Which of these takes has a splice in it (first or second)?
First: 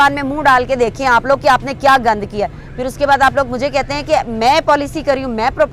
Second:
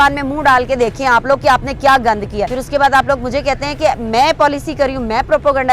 second